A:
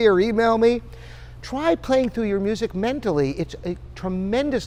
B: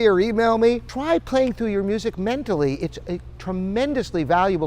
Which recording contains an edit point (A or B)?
B